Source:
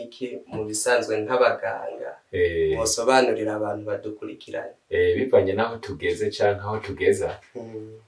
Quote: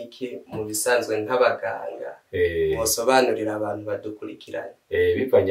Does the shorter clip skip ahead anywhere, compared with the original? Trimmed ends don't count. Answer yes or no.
no